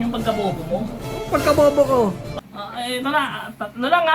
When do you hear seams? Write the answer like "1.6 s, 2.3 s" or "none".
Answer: 2.3 s